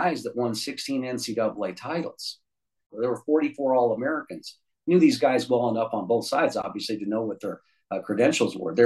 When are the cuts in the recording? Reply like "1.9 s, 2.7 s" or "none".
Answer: 2.9 s

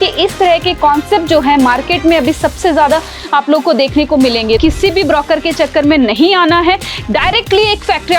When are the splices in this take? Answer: 4.6 s

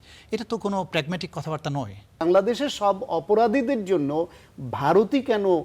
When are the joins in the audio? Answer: 2.2 s

